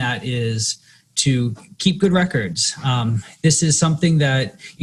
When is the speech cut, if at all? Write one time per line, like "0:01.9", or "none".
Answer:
none